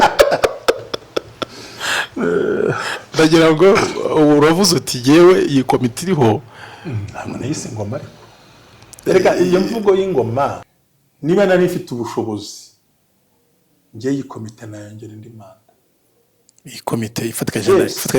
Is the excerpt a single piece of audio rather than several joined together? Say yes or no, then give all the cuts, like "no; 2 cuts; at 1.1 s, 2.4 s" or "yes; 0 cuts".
no; 1 cut; at 10.7 s